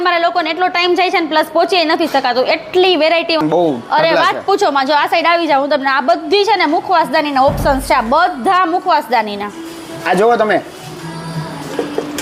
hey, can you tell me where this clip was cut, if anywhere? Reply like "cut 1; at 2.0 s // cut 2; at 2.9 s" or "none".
cut 1; at 3.4 s